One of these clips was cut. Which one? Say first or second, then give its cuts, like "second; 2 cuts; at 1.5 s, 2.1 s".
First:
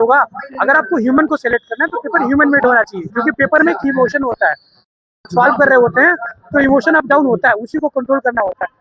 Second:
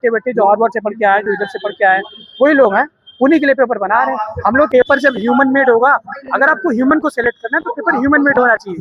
second; 1 cut; at 4.7 s